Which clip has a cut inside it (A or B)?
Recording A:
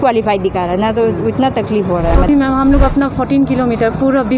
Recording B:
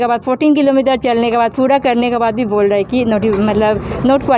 A